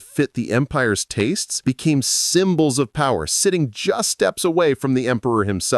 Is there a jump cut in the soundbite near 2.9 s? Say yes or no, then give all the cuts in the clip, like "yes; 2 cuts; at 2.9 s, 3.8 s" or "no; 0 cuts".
no; 1 cut; at 1.5 s